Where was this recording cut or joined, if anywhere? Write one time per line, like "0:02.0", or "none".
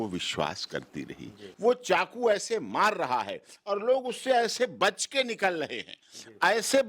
0:01.5